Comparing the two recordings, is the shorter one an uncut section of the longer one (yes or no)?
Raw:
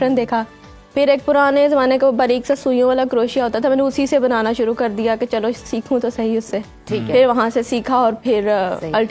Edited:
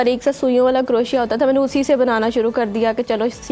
yes